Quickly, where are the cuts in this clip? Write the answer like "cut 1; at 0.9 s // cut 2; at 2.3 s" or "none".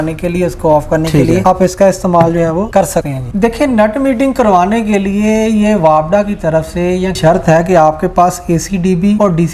cut 1; at 3.3 s // cut 2; at 7.2 s